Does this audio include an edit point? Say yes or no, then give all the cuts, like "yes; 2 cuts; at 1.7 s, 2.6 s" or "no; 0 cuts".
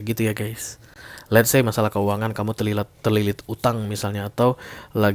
no; 0 cuts